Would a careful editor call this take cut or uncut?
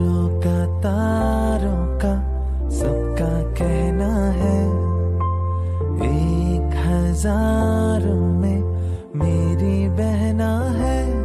uncut